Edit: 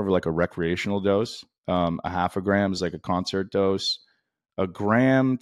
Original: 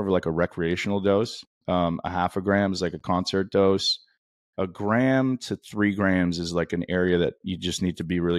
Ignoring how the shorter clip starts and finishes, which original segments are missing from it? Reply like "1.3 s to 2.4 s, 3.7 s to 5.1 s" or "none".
none